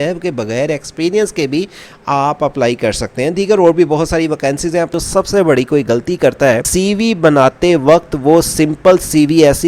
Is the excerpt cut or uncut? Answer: cut